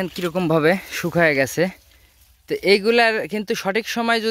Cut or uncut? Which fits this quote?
uncut